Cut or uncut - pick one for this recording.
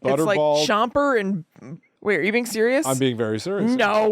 cut